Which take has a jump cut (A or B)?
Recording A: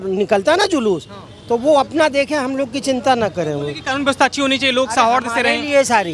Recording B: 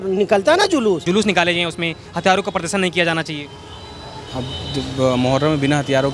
B